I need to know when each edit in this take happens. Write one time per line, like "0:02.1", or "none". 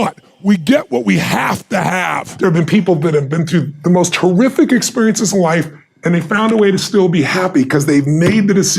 0:02.3